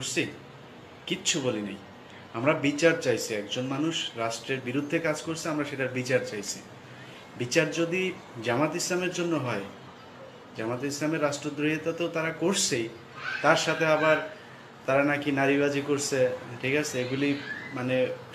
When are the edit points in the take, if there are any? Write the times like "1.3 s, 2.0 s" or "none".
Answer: 2.5 s

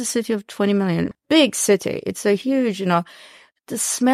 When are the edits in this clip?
1.1 s

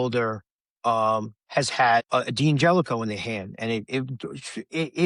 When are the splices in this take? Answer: 2.1 s

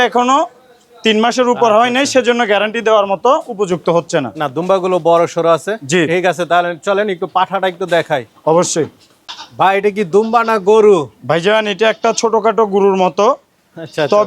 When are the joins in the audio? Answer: none

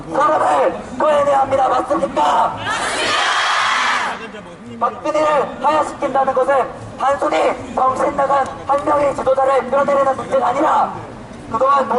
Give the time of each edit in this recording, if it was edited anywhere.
1.2 s

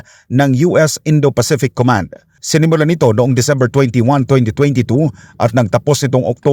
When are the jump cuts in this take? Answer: none

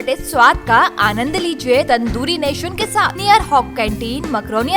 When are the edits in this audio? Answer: 1.9 s, 3.1 s

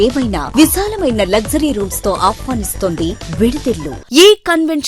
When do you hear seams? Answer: 3.9 s

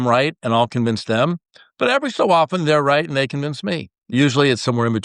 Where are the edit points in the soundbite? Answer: 4.1 s

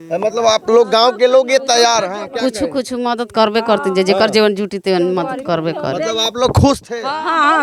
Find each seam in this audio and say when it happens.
none

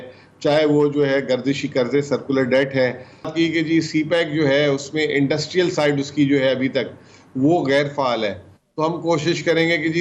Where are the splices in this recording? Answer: 3.3 s

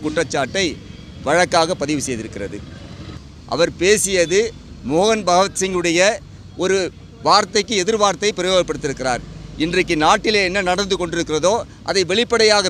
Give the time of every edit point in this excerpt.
3.1 s

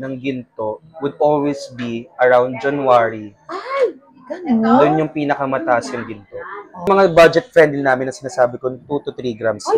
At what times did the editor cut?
6.9 s

